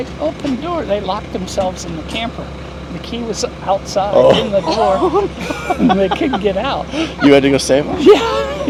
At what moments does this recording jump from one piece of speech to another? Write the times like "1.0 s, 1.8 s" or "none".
none